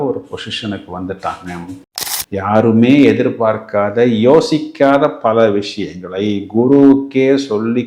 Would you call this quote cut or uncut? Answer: cut